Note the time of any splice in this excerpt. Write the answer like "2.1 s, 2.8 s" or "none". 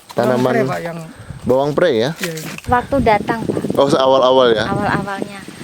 2.6 s